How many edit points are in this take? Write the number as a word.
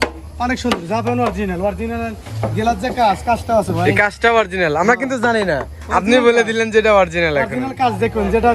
zero